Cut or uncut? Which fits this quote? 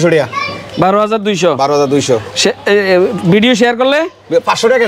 uncut